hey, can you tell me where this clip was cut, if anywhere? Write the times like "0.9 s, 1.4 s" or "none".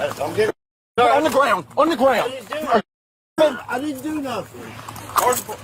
4.7 s